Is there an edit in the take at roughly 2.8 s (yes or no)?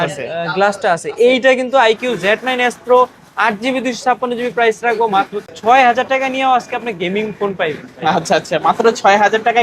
no